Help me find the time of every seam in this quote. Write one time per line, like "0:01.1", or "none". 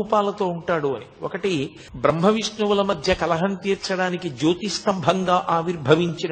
0:01.8